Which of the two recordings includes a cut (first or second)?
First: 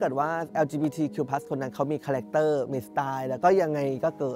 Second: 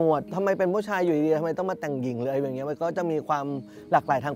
first